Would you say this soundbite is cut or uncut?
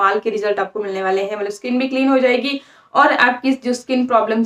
uncut